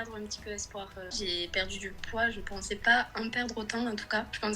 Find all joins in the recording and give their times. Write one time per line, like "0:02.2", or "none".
0:01.1